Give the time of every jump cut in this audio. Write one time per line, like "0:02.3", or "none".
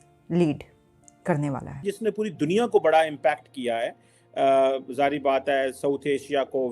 0:01.8